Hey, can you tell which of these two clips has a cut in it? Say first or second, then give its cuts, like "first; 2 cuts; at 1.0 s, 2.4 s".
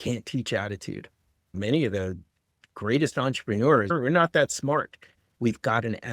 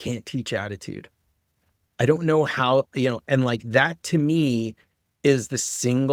first; 3 cuts; at 1.5 s, 3.9 s, 5.3 s